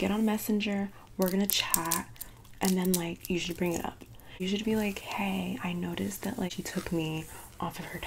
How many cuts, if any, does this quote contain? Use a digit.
2